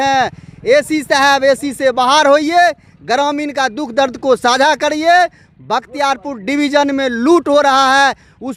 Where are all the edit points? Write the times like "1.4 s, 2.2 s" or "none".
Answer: none